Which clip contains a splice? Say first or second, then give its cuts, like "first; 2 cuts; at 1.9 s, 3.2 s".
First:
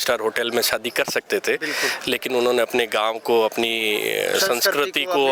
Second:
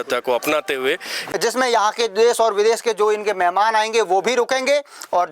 second; 1 cut; at 1.2 s